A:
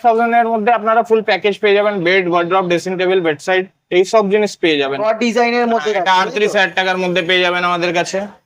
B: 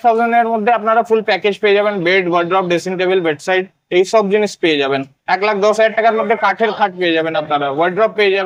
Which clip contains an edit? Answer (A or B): A